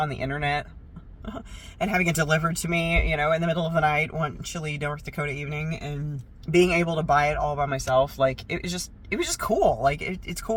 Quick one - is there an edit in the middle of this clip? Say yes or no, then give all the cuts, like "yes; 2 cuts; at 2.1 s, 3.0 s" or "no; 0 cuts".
no; 0 cuts